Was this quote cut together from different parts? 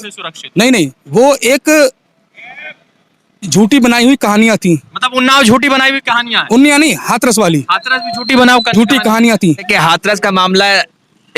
yes; 1 cut; at 9.7 s

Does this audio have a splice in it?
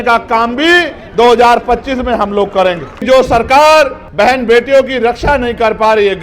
yes; 2 cuts; at 2.9 s, 4.0 s

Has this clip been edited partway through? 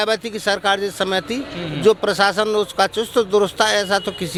no; 0 cuts

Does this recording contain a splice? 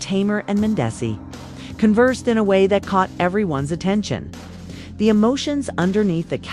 yes; 3 cuts; at 1.0 s, 2.7 s, 3.8 s

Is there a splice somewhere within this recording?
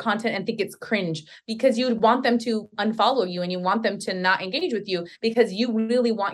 no; 0 cuts

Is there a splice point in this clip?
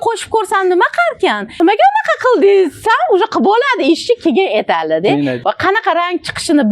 yes; 2 cuts; at 1.6 s, 5.4 s

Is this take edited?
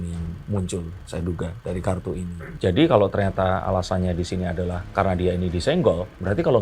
yes; 1 cut; at 2.5 s

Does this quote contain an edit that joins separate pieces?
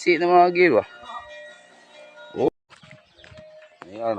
yes; 1 cut; at 2.7 s

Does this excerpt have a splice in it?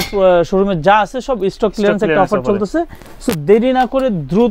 no; 0 cuts

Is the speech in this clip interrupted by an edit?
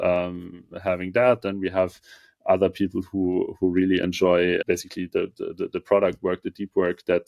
yes; 1 cut; at 4.6 s

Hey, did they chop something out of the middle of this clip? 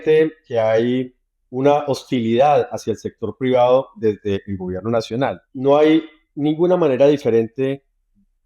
yes; 1 cut; at 5.5 s

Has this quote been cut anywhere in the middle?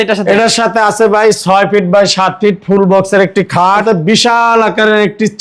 yes; 1 cut; at 3.8 s

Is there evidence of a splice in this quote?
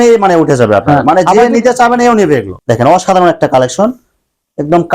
yes; 1 cut; at 2.5 s

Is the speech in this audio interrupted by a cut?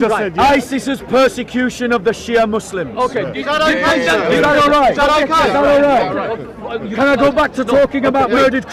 no; 0 cuts

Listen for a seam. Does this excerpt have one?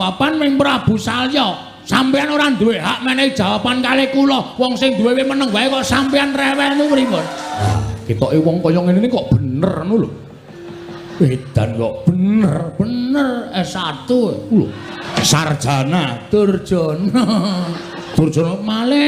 yes; 4 cuts; at 1.7 s, 7.7 s, 15.1 s, 17.9 s

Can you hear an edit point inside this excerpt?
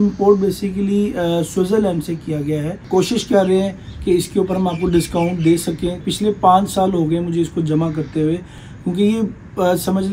yes; 2 cuts; at 2.8 s, 6.0 s

